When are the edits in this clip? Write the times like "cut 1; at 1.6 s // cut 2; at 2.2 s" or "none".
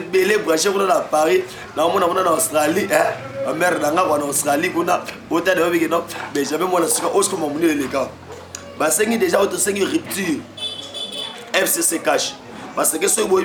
none

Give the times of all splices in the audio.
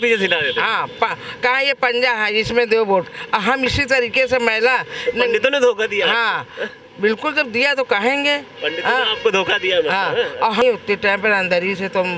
cut 1; at 10.6 s

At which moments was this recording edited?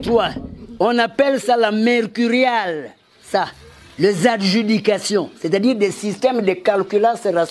none

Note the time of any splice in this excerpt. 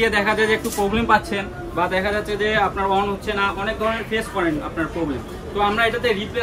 none

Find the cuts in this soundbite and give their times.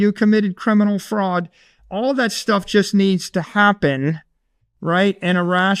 none

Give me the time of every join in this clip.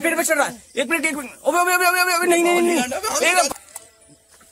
cut 1; at 3.5 s

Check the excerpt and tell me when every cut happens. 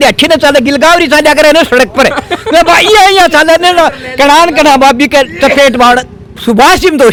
none

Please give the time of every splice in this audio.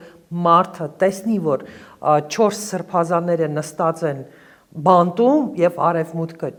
none

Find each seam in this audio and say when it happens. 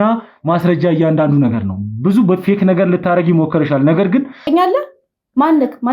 cut 1; at 4.5 s

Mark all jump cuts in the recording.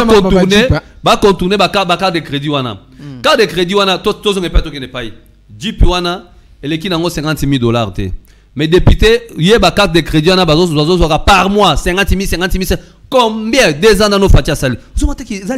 none

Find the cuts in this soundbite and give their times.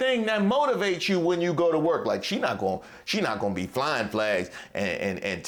none

